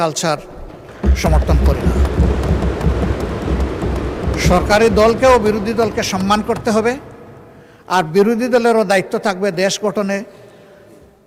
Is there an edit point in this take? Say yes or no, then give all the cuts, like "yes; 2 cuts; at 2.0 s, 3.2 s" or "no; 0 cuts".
no; 0 cuts